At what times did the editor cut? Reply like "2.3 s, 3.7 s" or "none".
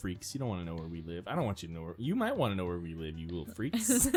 none